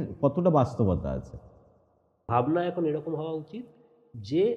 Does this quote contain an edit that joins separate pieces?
yes; 1 cut; at 2.3 s

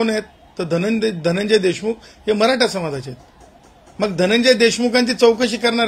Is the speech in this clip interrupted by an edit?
no; 0 cuts

